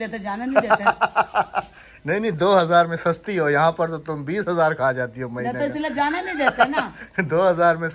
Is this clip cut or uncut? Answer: uncut